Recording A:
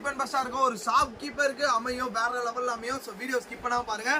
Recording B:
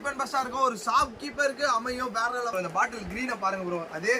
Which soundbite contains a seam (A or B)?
B